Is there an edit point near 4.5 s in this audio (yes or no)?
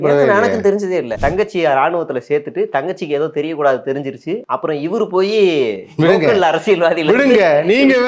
yes